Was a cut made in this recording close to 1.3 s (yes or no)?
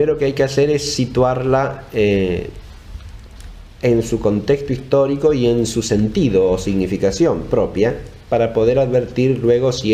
yes